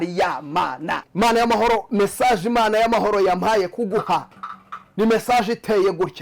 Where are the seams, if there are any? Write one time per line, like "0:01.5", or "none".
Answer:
0:01.0